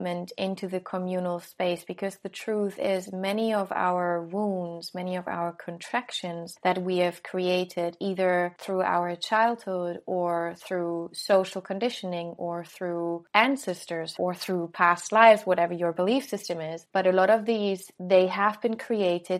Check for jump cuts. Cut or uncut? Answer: cut